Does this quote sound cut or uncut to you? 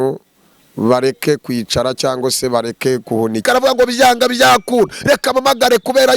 cut